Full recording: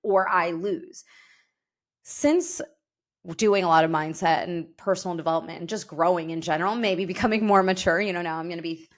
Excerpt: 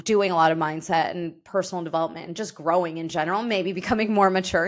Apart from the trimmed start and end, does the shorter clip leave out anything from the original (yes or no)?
no